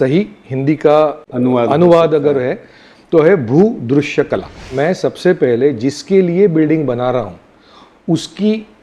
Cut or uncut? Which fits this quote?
cut